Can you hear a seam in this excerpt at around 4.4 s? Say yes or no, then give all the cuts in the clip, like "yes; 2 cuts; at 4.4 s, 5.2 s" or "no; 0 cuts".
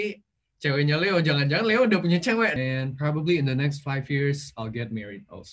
no; 1 cut; at 2.5 s